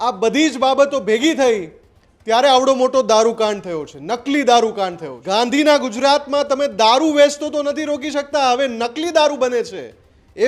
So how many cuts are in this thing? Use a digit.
1